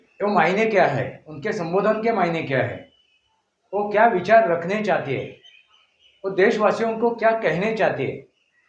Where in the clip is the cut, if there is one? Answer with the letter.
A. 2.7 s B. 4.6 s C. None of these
C